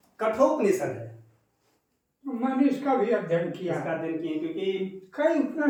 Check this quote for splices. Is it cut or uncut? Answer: uncut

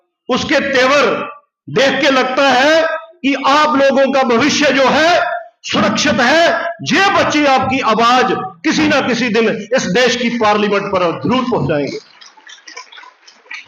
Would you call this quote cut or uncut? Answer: uncut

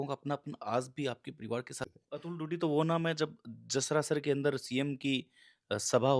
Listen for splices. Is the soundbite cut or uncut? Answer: cut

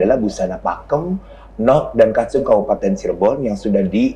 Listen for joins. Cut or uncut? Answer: uncut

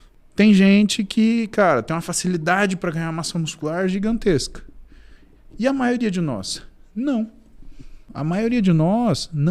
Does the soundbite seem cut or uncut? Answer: cut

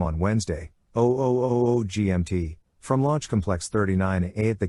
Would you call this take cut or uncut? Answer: uncut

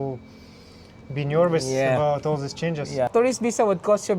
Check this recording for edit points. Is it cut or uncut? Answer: cut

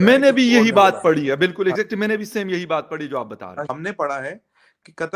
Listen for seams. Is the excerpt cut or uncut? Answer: uncut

